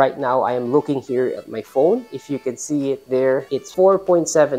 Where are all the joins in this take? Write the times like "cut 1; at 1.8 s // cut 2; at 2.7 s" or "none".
cut 1; at 3.6 s